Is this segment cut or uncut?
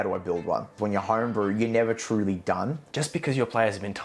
cut